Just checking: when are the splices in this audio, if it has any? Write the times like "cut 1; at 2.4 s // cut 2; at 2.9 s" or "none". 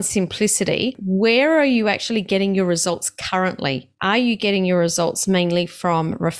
cut 1; at 1.0 s // cut 2; at 3.9 s